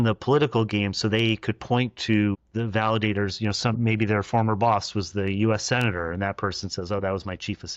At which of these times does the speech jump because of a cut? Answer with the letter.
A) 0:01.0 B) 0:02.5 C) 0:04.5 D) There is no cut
B